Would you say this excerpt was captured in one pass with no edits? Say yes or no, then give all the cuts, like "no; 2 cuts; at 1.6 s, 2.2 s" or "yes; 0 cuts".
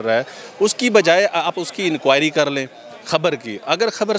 yes; 0 cuts